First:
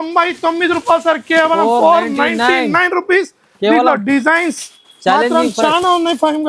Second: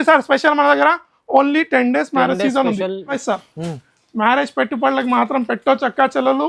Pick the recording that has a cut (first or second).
second